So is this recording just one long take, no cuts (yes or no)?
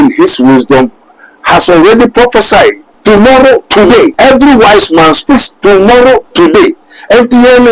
no